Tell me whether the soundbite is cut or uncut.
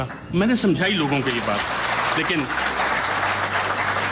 uncut